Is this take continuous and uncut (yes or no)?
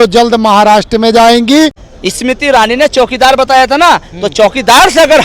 no